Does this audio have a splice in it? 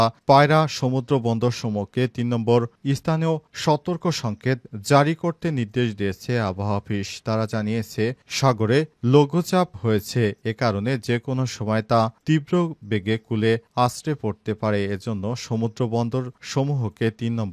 no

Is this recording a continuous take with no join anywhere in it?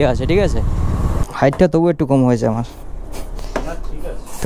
no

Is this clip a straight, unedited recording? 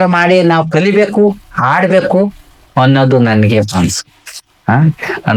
yes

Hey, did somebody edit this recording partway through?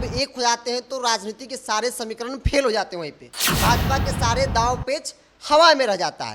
no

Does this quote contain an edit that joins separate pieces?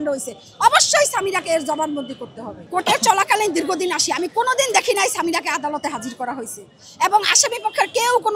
yes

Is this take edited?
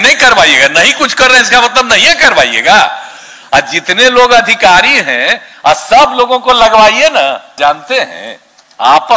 yes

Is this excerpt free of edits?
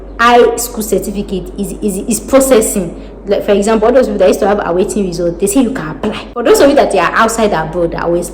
no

